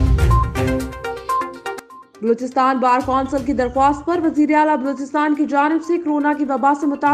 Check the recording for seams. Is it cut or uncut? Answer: cut